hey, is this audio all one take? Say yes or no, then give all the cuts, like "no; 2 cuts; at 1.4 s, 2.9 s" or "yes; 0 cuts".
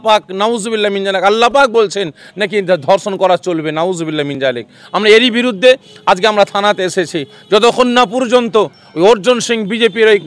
yes; 0 cuts